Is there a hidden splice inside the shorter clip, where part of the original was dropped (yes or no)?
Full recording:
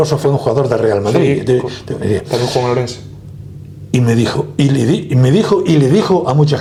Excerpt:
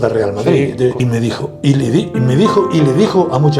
yes